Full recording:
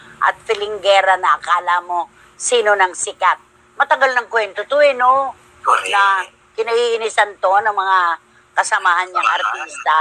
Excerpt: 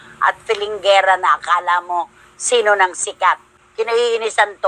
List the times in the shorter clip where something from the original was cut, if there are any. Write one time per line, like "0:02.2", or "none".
0:03.6